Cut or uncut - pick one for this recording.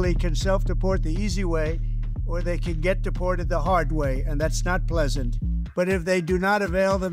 cut